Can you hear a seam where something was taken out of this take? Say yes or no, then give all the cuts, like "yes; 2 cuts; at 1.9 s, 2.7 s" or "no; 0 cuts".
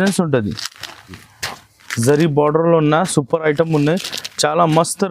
yes; 1 cut; at 1.2 s